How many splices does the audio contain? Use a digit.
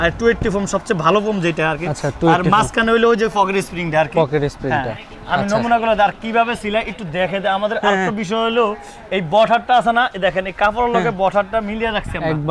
0